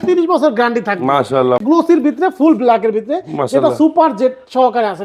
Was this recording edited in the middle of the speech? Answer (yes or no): yes